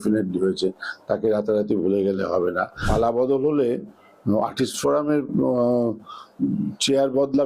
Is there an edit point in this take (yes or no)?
yes